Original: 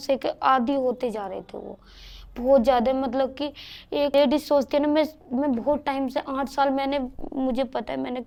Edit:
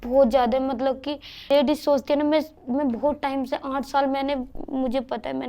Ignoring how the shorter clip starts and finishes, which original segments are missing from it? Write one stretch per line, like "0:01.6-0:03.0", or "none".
0:03.8-0:04.1